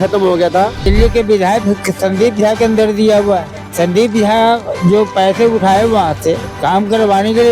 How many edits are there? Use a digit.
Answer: 3